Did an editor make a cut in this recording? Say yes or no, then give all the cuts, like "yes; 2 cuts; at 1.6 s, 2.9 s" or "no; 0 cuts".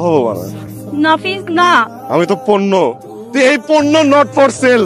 no; 0 cuts